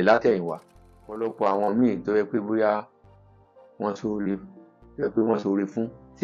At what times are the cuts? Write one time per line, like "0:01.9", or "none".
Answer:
0:01.3